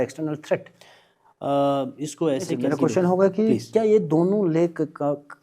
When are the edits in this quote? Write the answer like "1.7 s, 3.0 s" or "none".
2.6 s